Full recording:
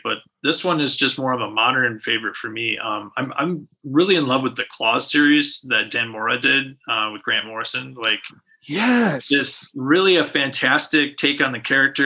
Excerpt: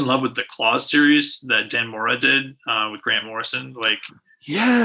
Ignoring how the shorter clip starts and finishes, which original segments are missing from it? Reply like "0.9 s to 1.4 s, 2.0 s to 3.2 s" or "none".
none

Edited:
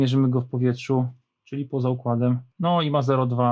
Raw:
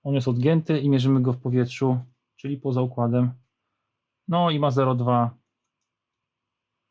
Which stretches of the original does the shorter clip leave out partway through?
3.4 s to 4.2 s

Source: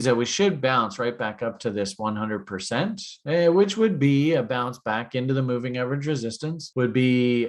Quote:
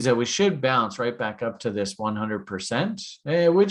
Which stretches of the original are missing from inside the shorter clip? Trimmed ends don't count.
none

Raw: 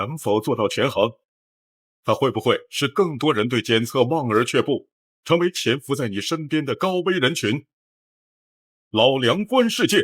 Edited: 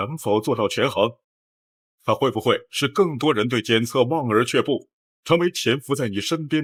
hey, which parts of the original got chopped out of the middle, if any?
none

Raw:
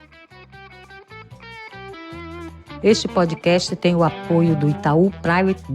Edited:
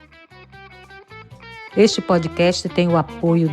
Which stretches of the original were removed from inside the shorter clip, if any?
1.7 s to 2.8 s

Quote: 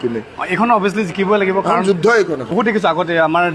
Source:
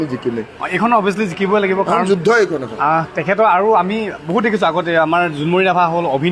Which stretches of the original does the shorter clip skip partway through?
2.6 s to 4.2 s

